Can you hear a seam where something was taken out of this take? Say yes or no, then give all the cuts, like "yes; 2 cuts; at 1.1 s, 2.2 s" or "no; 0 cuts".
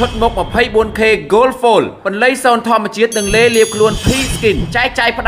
no; 0 cuts